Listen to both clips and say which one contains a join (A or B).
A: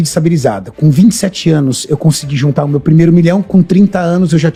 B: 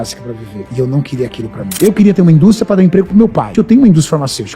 B